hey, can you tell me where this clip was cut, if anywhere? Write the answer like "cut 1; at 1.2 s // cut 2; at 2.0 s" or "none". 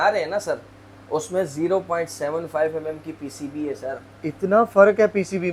none